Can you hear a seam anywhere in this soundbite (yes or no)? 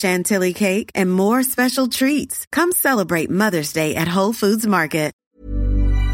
yes